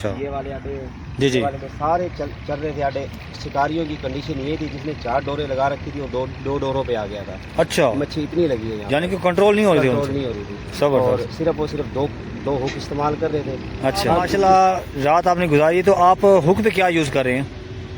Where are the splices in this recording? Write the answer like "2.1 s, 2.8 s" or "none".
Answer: 14.3 s

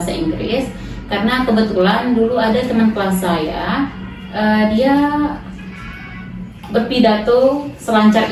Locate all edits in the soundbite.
none

